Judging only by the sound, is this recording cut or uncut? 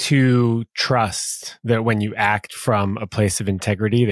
uncut